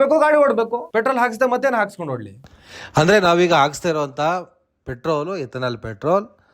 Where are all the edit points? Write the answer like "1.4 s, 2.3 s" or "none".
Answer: 2.3 s